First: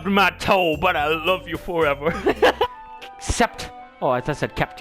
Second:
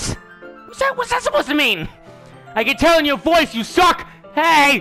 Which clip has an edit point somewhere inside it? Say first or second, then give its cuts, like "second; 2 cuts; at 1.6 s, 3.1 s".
first; 1 cut; at 2.6 s